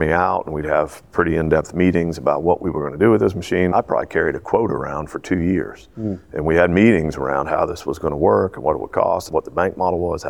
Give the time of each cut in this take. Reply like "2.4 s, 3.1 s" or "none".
3.7 s, 9.3 s